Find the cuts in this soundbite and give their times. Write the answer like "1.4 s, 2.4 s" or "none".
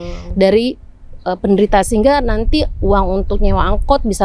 none